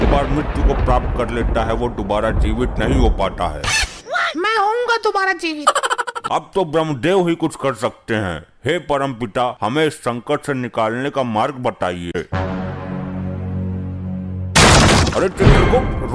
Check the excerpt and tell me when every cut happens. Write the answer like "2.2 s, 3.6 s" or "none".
6.2 s, 12.2 s